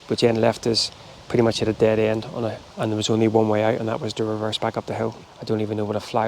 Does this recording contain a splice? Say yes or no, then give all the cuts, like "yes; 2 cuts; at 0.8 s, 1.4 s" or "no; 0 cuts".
yes; 2 cuts; at 2.6 s, 5.3 s